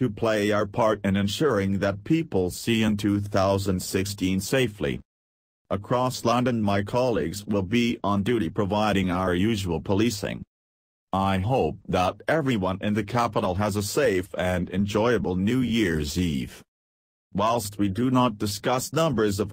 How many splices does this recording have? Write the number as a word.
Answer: one